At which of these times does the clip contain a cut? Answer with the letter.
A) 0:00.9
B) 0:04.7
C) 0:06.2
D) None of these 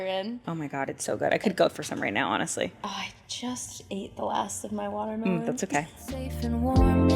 C